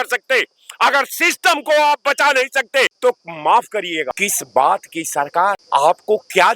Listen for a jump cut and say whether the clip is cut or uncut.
cut